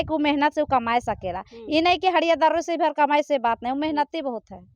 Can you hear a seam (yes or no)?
no